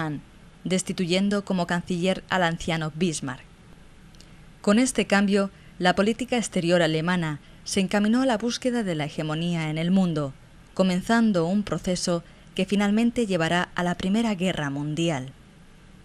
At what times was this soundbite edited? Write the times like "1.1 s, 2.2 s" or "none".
12.4 s